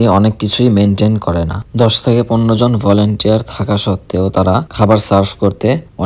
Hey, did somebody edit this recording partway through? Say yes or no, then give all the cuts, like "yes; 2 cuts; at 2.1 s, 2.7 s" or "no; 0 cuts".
no; 0 cuts